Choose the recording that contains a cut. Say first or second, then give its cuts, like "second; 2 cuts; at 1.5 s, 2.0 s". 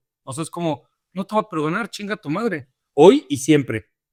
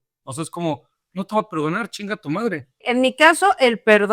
second; 1 cut; at 2.9 s